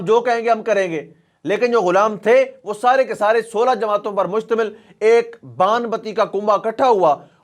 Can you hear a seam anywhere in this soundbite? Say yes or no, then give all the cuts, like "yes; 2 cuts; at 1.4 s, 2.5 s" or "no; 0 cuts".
no; 0 cuts